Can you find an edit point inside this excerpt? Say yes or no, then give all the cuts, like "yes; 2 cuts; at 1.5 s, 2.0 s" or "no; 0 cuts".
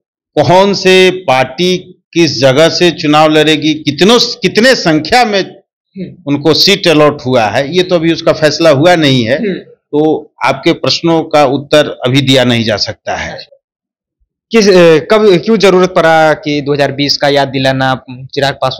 no; 0 cuts